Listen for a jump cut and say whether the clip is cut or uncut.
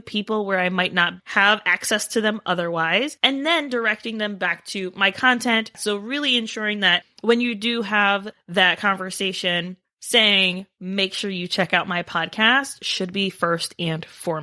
cut